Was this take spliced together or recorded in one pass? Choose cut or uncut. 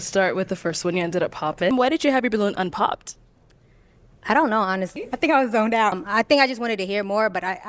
cut